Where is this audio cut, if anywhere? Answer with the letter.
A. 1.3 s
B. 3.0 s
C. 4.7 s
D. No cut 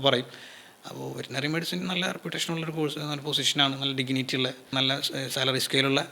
C